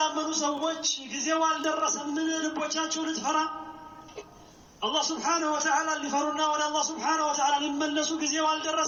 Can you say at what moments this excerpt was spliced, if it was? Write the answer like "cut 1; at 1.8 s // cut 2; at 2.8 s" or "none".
none